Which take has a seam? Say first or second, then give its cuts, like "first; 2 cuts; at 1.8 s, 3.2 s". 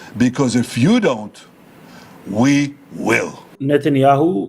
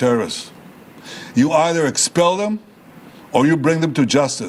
first; 1 cut; at 3.4 s